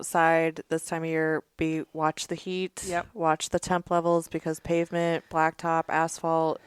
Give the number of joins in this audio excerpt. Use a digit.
0